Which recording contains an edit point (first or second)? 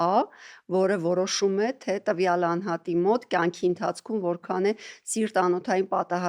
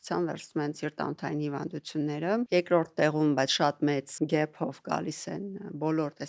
second